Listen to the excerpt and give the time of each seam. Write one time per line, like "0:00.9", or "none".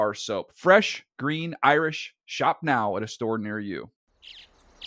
0:04.0